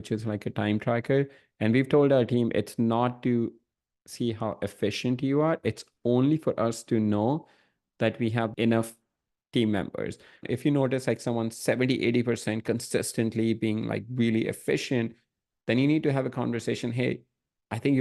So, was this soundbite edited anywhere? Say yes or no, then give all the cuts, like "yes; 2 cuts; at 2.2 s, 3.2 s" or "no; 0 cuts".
yes; 2 cuts; at 8.5 s, 10.4 s